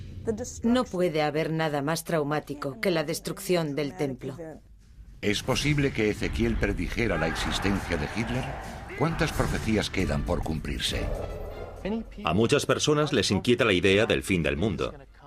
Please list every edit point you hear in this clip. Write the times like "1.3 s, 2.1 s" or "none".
none